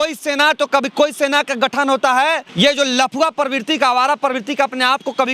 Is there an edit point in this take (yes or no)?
yes